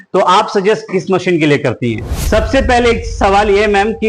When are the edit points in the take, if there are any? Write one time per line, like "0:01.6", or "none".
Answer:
0:02.2